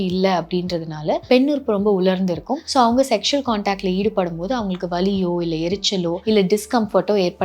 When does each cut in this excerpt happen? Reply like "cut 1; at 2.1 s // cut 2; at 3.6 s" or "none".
cut 1; at 1.2 s // cut 2; at 2.6 s // cut 3; at 6.2 s

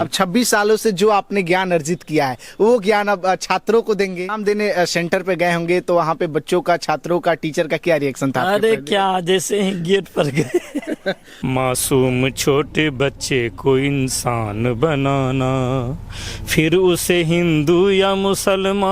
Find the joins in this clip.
cut 1; at 4.4 s // cut 2; at 11.3 s

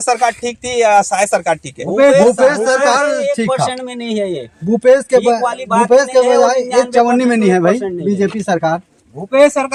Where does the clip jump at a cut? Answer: none

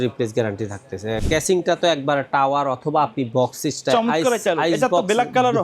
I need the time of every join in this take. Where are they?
cut 1; at 1.2 s

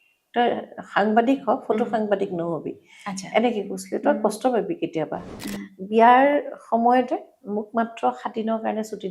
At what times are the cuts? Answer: cut 1; at 5.4 s

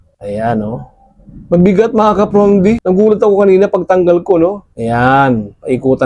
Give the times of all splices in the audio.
none

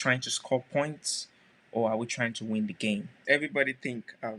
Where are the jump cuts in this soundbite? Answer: cut 1; at 3.2 s

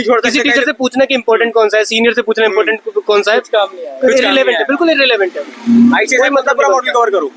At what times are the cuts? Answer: none

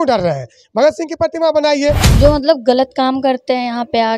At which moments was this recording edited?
cut 1; at 2.1 s

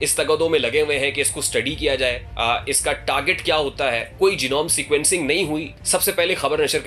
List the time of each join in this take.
cut 1; at 2.3 s // cut 2; at 4.1 s // cut 3; at 5.7 s

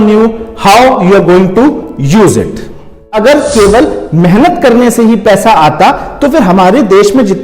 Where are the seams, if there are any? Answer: cut 1; at 3.1 s

